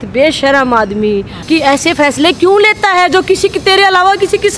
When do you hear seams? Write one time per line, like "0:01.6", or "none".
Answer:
0:01.3